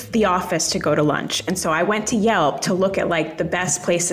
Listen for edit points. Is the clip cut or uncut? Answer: uncut